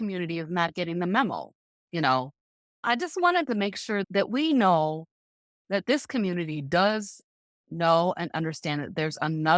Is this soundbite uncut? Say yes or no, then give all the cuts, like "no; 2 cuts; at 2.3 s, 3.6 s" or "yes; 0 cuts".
no; 2 cuts; at 2.8 s, 4.1 s